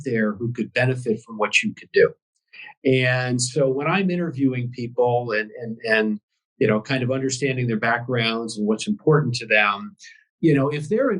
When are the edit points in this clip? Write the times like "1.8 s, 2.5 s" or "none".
none